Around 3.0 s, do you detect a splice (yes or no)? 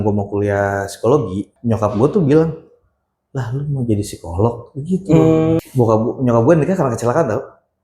no